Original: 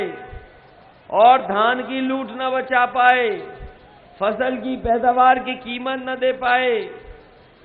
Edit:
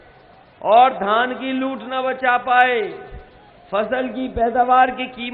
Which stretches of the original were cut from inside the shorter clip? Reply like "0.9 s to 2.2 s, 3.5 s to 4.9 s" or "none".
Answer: none

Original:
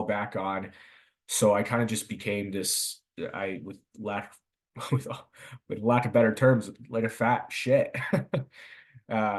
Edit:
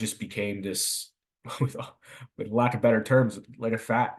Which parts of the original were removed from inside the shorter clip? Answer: 3.0 s to 4.4 s

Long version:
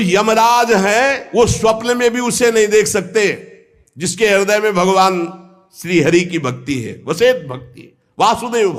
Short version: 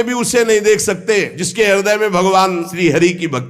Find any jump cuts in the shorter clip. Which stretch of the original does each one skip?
3.5 s to 4.0 s, 5.3 s to 5.8 s

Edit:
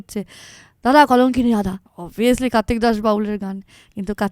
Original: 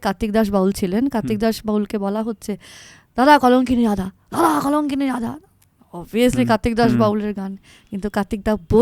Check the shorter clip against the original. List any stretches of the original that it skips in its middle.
4.2 s to 5.8 s

